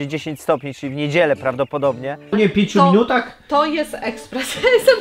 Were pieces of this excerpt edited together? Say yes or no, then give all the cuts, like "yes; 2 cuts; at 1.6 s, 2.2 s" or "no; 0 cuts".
yes; 1 cut; at 2.3 s